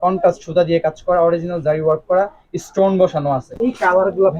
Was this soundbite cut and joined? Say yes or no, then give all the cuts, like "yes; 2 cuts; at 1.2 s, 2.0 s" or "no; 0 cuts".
yes; 1 cut; at 3.5 s